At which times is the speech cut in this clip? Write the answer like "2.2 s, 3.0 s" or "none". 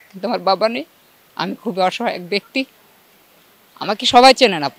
none